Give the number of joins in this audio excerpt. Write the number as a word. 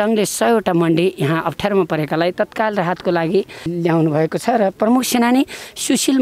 one